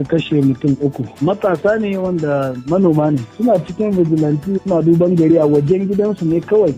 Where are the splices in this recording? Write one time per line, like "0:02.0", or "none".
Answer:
0:03.4